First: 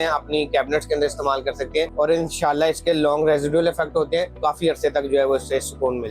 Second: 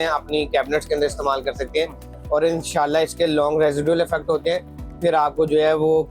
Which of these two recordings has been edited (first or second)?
first